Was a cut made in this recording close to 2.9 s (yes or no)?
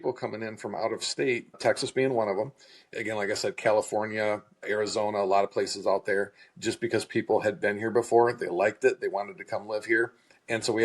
yes